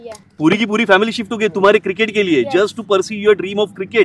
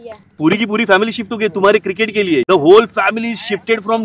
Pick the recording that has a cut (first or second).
second